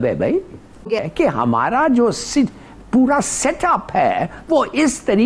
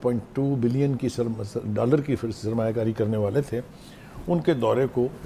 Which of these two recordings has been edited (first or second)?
first